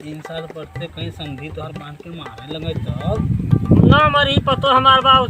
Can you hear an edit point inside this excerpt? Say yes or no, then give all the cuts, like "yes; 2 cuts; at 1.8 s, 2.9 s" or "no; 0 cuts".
no; 0 cuts